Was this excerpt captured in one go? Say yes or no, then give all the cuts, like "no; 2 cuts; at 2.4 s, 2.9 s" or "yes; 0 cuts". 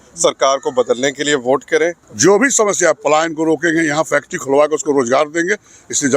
no; 1 cut; at 2.0 s